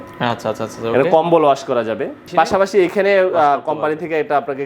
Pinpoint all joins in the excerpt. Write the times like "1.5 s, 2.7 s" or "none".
2.2 s